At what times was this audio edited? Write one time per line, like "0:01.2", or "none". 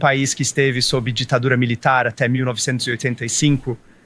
none